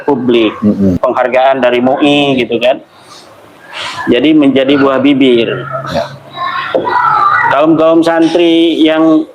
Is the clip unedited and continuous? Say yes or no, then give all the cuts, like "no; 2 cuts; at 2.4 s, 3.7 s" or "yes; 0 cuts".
no; 1 cut; at 1.0 s